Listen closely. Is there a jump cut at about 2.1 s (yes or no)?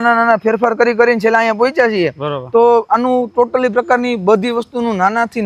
no